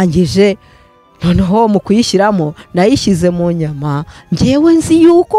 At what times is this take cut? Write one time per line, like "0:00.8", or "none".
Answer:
none